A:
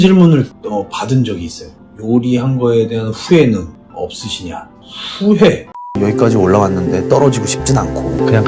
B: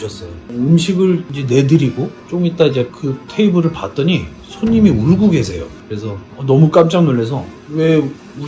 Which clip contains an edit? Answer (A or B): A